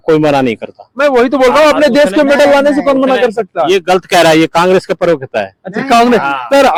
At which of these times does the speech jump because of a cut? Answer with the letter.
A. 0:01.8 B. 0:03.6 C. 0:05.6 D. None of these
D